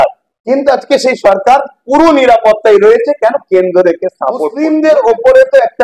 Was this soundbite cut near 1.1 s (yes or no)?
no